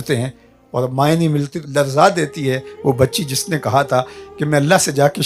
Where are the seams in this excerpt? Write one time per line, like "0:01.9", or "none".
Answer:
0:01.6